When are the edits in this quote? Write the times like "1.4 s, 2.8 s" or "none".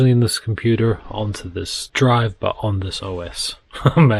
none

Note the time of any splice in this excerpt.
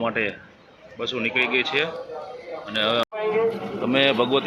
3.0 s

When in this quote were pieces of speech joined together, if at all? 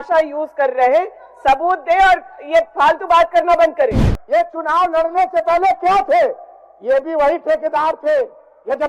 3.9 s

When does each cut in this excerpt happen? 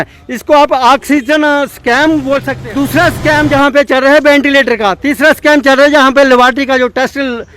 2.5 s

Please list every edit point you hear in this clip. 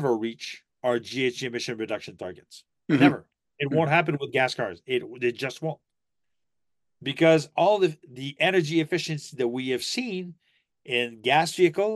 none

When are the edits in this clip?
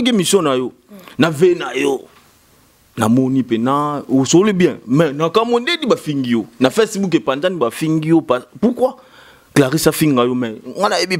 none

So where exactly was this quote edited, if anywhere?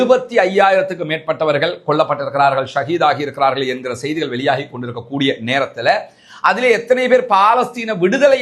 none

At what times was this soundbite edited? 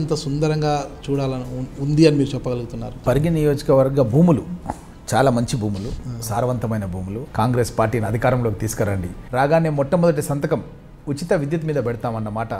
3.0 s, 7.2 s, 9.1 s

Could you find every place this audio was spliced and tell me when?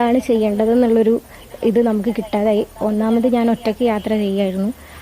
3.1 s

